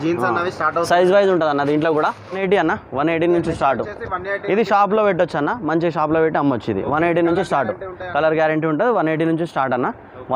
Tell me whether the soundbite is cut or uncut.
cut